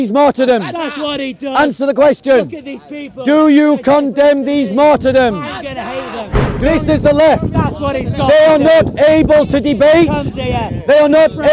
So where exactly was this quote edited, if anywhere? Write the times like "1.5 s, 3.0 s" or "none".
6.5 s